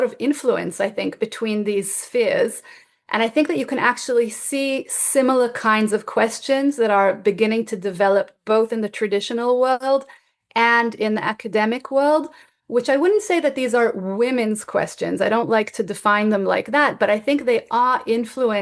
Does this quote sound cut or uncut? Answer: uncut